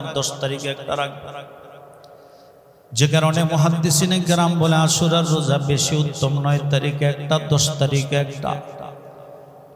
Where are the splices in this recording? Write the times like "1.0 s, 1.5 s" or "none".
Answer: none